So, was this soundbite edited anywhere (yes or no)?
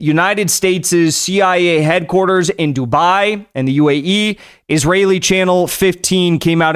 no